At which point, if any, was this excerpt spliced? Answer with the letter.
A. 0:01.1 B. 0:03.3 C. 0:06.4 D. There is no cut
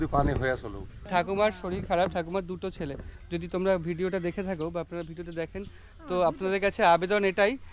A